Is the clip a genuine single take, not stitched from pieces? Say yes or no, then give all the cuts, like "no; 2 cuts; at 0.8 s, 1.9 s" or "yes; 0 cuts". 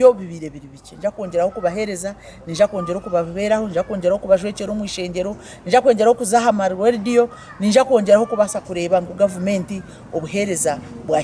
yes; 0 cuts